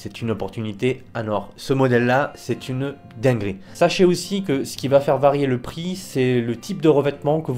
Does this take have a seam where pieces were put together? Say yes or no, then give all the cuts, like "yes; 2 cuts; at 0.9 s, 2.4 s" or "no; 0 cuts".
yes; 1 cut; at 3.6 s